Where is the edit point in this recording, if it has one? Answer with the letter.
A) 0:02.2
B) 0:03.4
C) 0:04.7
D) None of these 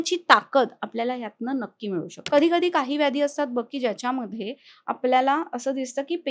A